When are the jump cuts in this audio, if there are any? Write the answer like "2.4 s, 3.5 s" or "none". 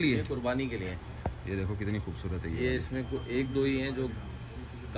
none

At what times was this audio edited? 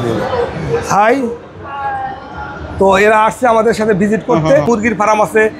4.7 s

